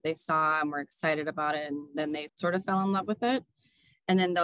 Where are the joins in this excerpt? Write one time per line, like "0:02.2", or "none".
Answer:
0:02.3